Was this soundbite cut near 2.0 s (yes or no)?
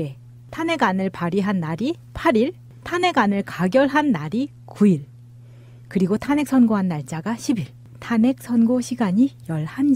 no